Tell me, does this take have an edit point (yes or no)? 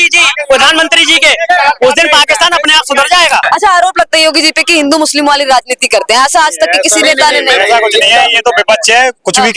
yes